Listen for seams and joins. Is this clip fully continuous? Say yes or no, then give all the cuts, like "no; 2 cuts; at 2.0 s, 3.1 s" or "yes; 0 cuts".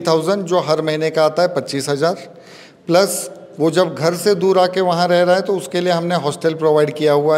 yes; 0 cuts